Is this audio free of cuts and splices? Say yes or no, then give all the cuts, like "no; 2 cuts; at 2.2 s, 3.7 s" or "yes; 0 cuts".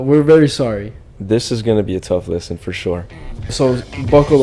no; 1 cut; at 3.5 s